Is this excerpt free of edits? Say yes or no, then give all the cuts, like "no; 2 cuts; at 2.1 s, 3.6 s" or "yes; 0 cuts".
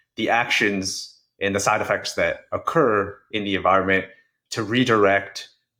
yes; 0 cuts